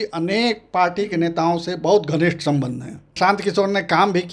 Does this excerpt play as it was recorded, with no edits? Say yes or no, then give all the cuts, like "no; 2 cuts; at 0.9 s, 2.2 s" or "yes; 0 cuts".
no; 1 cut; at 3.1 s